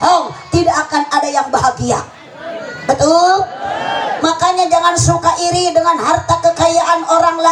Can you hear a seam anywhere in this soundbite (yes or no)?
no